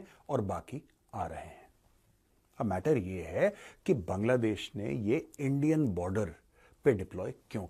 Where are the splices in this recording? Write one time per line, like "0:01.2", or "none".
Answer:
none

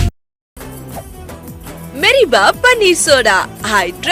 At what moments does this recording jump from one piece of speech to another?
none

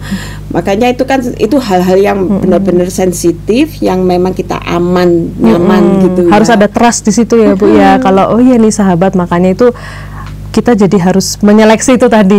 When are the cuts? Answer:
none

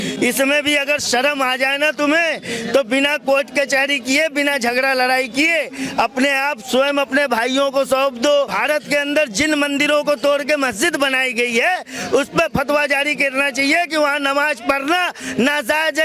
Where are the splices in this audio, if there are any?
0:08.5

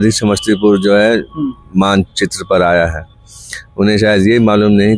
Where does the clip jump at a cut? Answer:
none

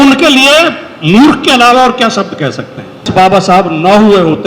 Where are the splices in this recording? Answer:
0:03.1

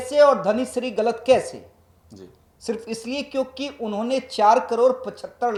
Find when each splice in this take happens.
none

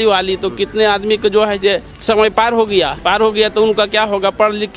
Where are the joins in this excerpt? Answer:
0:01.9
0:03.0

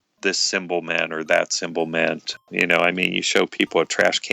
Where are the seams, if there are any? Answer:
0:02.4

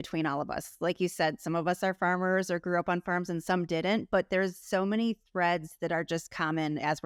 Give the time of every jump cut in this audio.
none

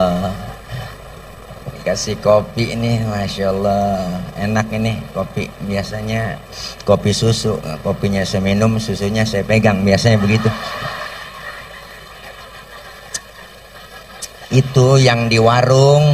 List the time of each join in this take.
none

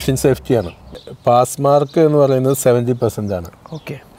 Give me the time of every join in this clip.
0:01.1

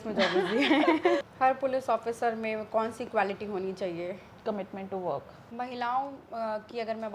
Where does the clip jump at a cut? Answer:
0:01.3
0:05.4

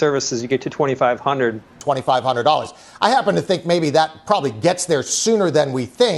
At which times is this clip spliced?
0:01.8

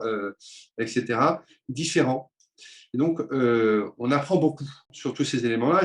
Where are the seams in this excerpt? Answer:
0:04.9

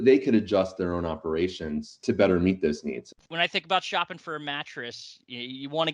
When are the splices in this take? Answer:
0:02.0
0:03.2

